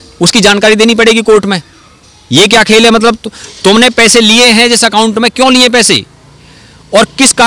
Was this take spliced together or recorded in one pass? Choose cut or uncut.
uncut